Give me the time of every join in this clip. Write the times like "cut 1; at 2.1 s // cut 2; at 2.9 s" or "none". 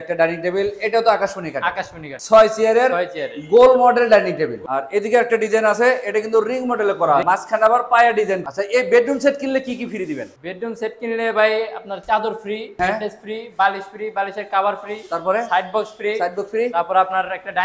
cut 1; at 2.2 s // cut 2; at 4.6 s // cut 3; at 7.2 s // cut 4; at 8.4 s // cut 5; at 12.7 s

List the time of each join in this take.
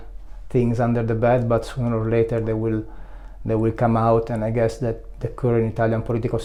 none

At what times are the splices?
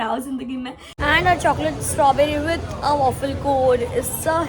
cut 1; at 0.9 s

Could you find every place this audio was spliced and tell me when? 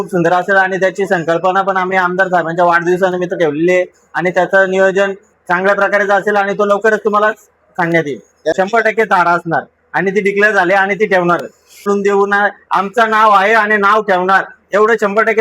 cut 1; at 8.5 s // cut 2; at 11.9 s

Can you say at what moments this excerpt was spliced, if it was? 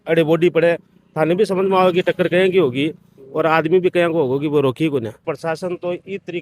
cut 1; at 5.3 s

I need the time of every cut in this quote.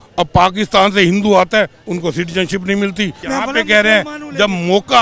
cut 1; at 3.2 s

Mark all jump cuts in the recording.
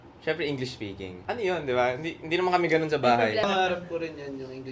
cut 1; at 1.2 s // cut 2; at 3.4 s

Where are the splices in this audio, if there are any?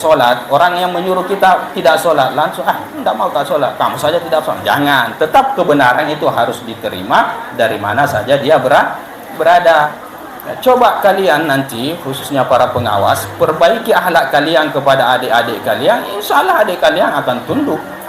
cut 1; at 10.0 s

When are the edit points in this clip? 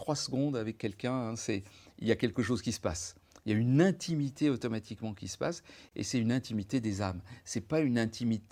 none

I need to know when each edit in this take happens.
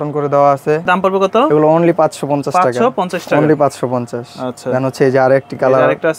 none

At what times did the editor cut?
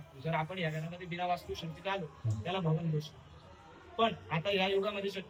none

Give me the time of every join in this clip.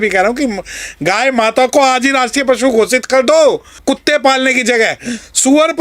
cut 1; at 3.8 s

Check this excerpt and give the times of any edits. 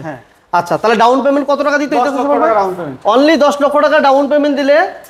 none

